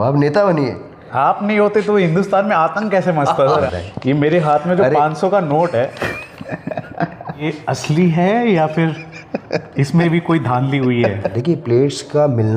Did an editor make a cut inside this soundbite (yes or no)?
yes